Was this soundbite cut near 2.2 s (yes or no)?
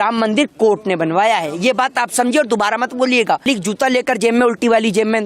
no